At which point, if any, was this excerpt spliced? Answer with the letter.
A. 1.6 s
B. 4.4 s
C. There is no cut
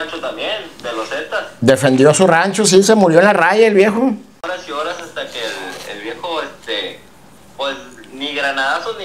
B